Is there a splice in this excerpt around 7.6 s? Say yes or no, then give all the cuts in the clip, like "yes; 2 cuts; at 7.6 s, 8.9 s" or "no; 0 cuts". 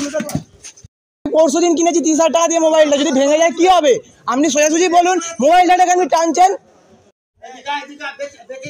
yes; 2 cuts; at 1.3 s, 7.6 s